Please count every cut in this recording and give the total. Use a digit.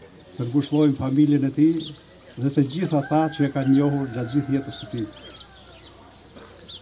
0